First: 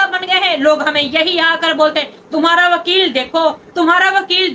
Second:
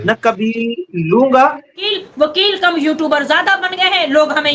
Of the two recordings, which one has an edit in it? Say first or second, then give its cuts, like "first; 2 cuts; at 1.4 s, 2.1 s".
second; 1 cut; at 1.8 s